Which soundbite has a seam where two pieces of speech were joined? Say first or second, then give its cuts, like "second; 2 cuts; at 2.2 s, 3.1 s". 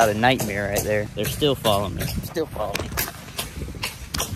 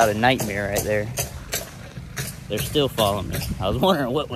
first; 2 cuts; at 1.1 s, 2.2 s